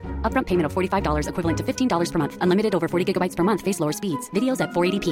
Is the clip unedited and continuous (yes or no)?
yes